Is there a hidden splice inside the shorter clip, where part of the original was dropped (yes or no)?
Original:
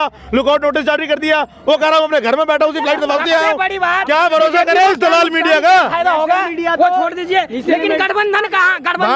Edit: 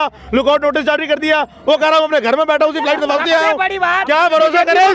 no